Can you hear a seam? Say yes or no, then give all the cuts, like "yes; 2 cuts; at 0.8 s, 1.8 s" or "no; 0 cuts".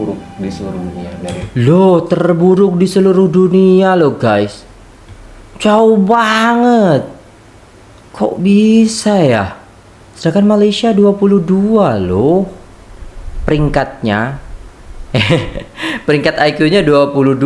no; 0 cuts